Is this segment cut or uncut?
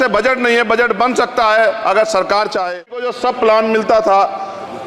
cut